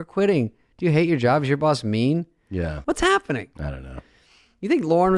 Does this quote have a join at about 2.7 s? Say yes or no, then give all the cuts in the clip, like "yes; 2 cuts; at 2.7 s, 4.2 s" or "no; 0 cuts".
yes; 1 cut; at 2.7 s